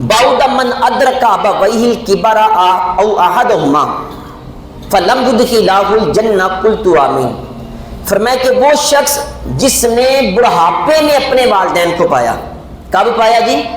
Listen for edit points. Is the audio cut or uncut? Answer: uncut